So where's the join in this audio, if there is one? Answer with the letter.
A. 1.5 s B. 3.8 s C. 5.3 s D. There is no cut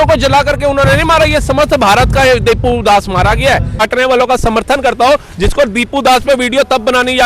B